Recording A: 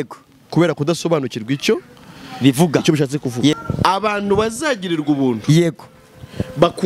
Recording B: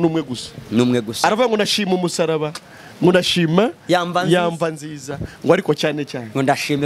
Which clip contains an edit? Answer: A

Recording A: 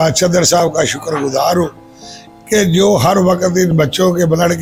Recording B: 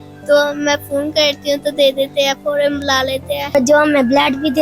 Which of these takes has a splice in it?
B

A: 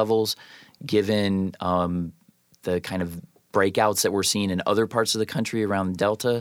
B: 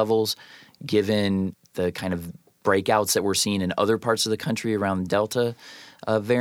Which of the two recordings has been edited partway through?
B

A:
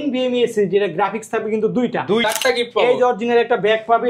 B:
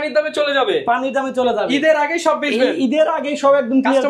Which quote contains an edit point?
A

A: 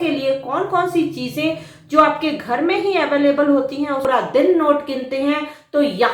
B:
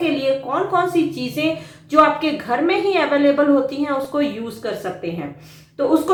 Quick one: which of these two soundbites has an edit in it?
A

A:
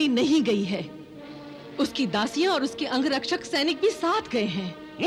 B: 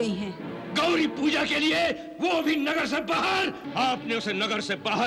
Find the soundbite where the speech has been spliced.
B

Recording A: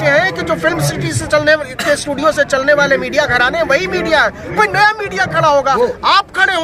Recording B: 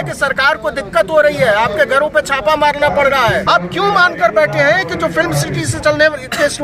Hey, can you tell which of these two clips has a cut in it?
B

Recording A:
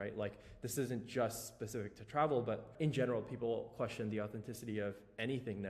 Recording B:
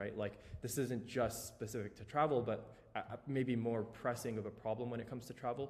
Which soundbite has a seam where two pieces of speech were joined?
A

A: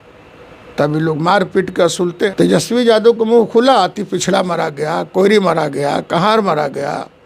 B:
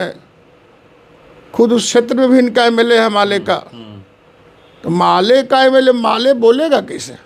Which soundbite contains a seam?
A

